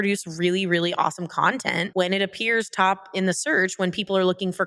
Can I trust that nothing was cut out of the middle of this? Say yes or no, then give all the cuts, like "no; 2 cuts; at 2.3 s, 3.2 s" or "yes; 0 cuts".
yes; 0 cuts